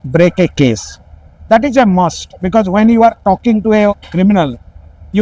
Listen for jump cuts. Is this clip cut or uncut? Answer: uncut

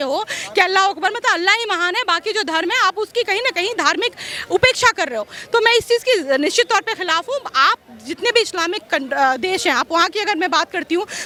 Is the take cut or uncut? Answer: uncut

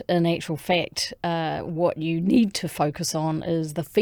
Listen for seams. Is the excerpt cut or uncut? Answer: uncut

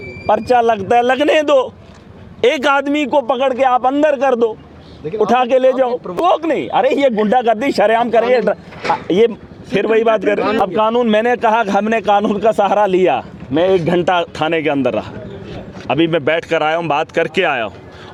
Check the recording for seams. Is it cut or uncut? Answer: uncut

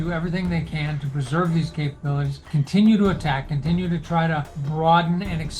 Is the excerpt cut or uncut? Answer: cut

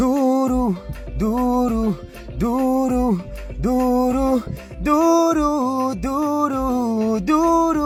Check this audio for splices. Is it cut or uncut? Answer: uncut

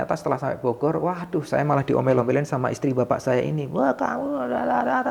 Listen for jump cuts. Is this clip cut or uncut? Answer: uncut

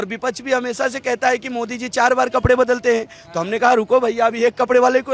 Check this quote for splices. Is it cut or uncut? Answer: uncut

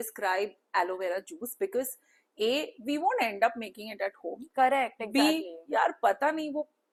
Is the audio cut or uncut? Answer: uncut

